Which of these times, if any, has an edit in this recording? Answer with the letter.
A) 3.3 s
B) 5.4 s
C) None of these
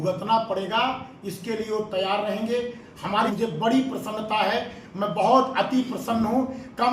A